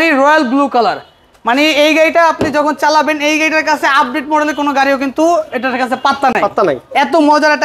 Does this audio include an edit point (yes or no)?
no